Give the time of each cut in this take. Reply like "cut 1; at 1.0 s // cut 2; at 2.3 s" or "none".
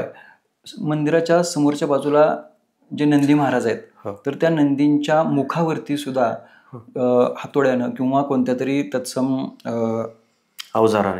none